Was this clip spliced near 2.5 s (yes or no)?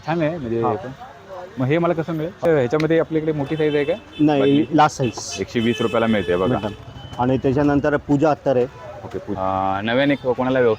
yes